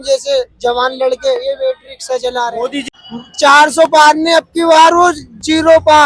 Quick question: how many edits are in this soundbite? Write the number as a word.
one